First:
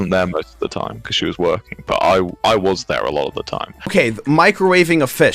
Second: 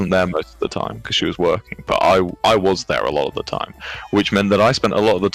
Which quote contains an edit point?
first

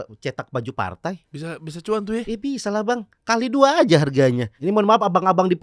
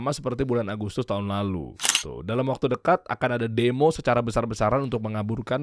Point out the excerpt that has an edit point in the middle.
first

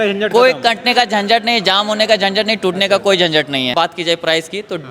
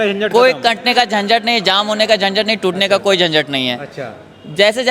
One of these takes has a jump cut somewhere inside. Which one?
first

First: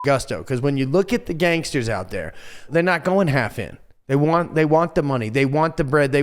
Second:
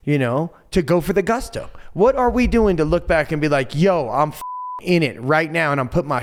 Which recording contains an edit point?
first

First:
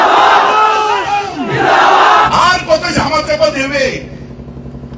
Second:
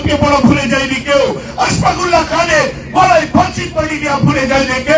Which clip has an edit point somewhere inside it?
first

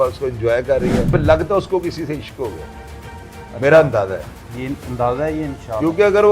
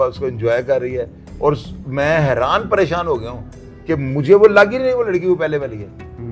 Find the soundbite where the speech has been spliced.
first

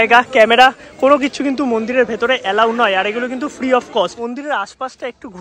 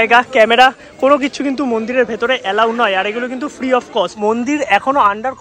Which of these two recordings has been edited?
second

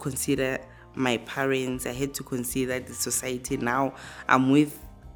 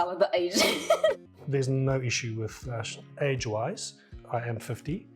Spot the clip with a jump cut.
second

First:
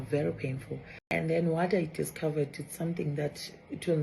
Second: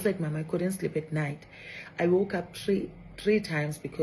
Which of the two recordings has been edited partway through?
first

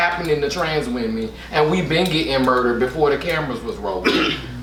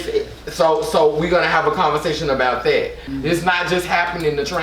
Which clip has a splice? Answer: second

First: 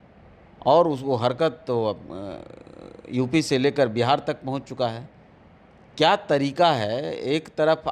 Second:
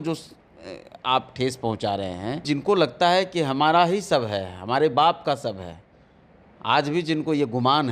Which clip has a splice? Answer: second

